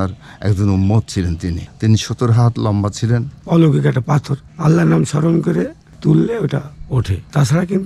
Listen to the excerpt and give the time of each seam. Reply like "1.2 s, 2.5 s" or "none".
3.3 s